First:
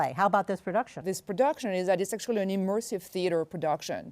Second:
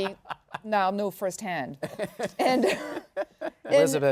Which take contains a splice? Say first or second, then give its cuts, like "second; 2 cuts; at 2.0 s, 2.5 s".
first; 1 cut; at 1.1 s